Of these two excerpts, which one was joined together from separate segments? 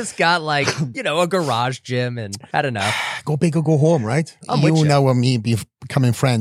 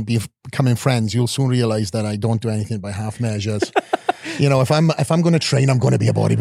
first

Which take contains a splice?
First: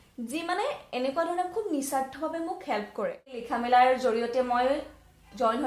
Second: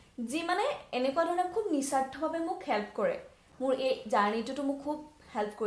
first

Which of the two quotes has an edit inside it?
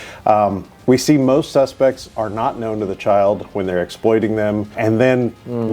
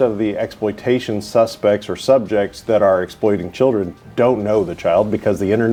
first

